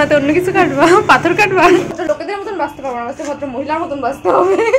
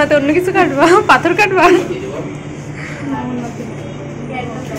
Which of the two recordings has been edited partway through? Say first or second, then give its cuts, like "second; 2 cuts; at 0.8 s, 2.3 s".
first; 1 cut; at 2.0 s